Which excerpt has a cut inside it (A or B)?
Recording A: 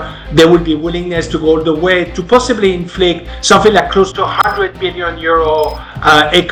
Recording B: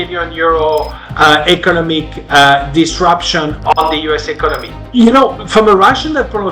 B